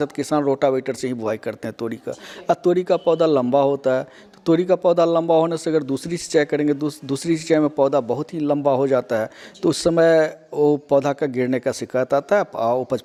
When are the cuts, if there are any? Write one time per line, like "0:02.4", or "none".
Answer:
none